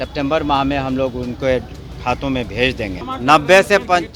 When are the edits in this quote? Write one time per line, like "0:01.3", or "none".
0:03.0